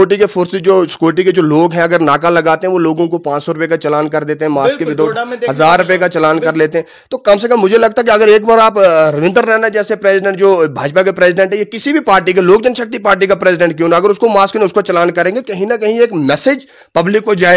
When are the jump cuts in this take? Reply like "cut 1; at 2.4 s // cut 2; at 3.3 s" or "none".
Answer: none